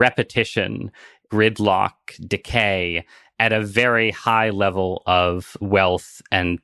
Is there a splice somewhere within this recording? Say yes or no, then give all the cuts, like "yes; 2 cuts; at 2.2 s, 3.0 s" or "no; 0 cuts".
no; 0 cuts